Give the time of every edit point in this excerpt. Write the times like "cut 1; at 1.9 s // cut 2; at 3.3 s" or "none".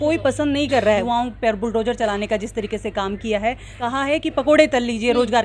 cut 1; at 1.0 s // cut 2; at 3.9 s